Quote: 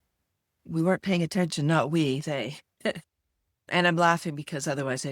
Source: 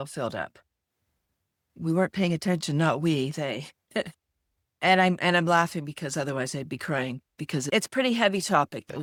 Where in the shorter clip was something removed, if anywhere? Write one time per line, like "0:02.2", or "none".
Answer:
0:03.7